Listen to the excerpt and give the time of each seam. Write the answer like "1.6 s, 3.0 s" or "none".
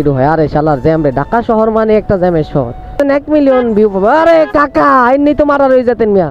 3.0 s